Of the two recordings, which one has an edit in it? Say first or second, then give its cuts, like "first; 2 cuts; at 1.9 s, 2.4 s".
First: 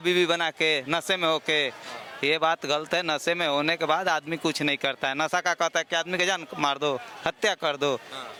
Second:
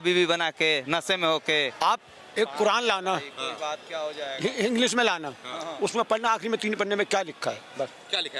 second; 1 cut; at 1.7 s